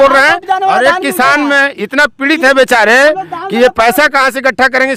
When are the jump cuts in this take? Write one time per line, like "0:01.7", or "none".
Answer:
none